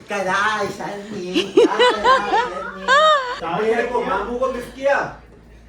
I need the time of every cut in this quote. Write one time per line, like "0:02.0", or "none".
0:03.4